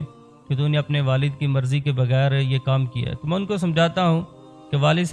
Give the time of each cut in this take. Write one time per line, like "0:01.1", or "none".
none